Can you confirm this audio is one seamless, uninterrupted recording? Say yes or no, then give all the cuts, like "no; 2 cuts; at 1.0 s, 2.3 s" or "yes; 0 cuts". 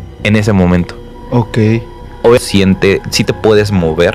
no; 1 cut; at 2.4 s